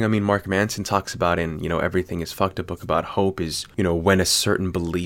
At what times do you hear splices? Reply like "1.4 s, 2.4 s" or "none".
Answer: 3.6 s